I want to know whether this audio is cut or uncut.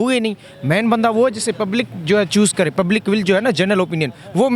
uncut